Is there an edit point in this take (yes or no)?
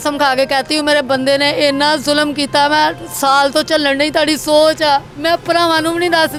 no